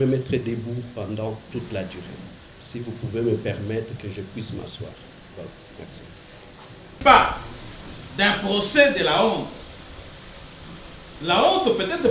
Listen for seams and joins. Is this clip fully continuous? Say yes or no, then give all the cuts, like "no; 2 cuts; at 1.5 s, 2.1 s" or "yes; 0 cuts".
no; 1 cut; at 7.0 s